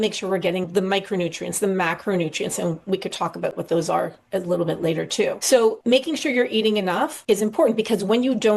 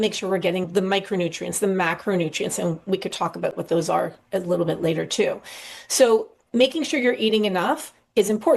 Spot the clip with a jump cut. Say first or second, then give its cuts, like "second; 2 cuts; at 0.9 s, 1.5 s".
first; 2 cuts; at 5.7 s, 7.2 s